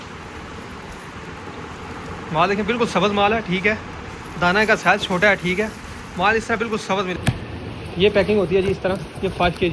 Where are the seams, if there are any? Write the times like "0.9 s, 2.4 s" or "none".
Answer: 7.1 s